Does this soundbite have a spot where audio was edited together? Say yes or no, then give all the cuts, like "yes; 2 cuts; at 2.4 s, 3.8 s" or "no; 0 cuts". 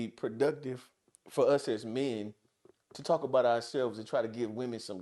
no; 0 cuts